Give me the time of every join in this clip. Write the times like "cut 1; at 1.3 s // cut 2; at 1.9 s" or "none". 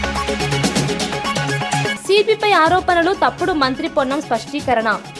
cut 1; at 2.0 s